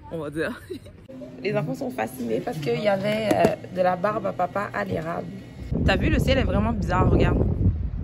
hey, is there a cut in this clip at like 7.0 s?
no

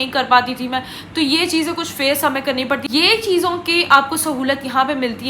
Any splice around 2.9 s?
yes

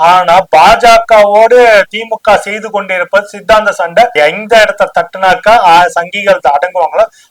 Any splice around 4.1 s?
yes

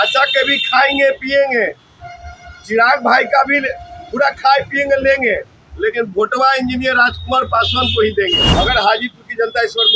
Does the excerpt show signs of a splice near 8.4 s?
yes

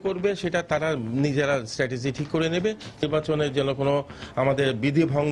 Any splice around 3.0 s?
yes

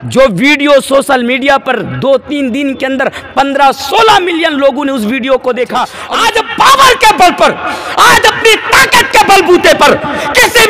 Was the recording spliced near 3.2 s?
no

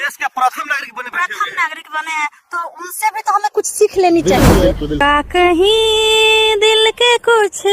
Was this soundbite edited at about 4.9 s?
yes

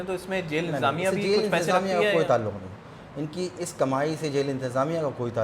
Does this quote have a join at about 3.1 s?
no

